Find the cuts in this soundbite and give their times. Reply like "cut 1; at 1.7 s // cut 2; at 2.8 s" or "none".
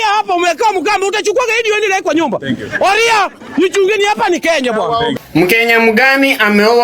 cut 1; at 5.1 s